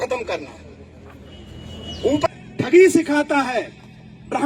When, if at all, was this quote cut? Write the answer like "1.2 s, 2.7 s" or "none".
2.3 s